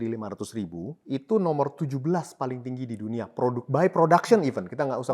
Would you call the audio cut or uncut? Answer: cut